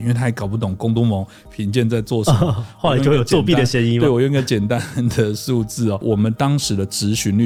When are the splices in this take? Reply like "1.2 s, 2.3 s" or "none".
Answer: none